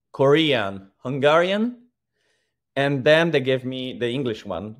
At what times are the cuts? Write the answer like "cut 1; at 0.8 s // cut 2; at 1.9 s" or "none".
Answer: none